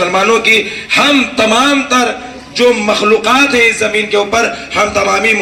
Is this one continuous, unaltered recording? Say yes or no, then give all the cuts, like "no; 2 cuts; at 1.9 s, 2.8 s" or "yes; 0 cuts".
yes; 0 cuts